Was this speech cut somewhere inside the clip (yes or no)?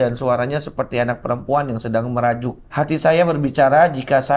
yes